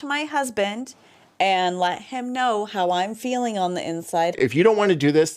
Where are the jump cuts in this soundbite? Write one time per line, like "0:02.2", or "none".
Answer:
0:04.4